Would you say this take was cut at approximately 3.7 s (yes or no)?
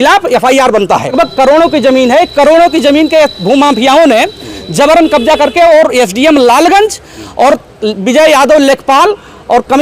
no